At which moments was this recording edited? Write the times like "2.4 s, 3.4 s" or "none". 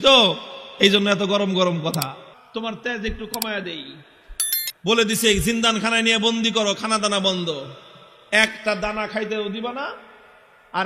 2.3 s